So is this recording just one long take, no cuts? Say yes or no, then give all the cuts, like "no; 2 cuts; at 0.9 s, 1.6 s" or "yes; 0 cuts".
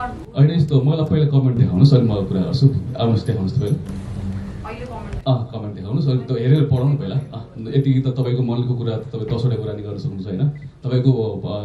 yes; 0 cuts